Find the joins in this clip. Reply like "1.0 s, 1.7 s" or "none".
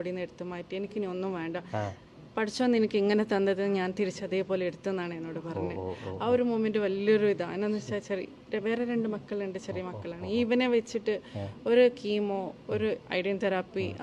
none